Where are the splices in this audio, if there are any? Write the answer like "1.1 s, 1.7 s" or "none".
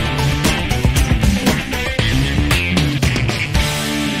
1.7 s